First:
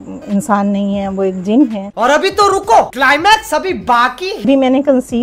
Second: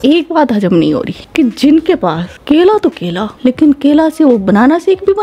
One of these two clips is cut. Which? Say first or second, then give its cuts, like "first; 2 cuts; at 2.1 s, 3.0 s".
first; 2 cuts; at 1.9 s, 2.9 s